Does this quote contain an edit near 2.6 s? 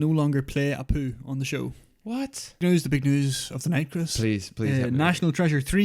yes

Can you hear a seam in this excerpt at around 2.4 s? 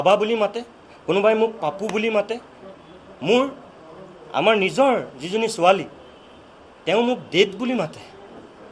no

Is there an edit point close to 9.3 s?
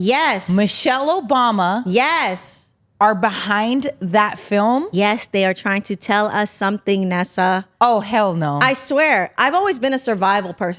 no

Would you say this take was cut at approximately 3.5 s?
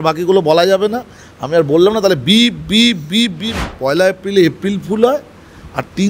yes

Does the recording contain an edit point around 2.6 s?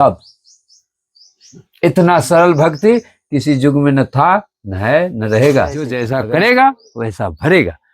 no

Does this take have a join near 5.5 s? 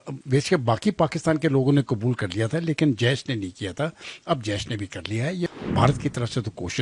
yes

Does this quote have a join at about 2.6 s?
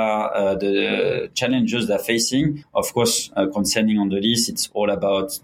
yes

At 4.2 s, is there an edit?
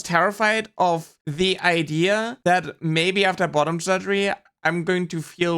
no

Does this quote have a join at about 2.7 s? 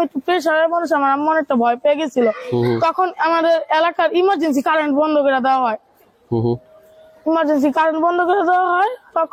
no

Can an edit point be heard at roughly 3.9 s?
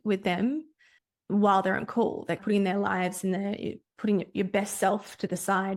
no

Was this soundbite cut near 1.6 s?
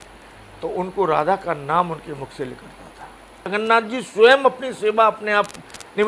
no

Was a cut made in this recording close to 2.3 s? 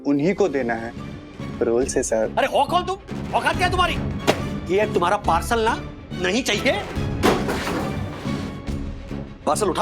yes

